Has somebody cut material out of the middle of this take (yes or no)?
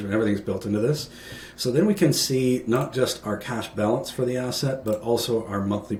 no